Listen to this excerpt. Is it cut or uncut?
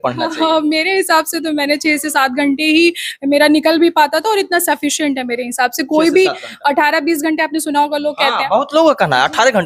uncut